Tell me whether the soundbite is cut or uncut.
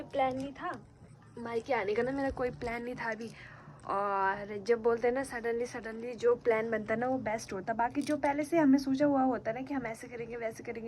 uncut